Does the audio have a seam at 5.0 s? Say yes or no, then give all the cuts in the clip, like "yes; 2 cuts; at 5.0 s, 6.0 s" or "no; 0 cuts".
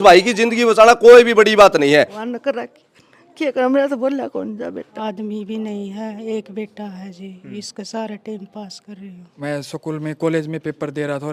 yes; 3 cuts; at 2.2 s, 5.0 s, 9.2 s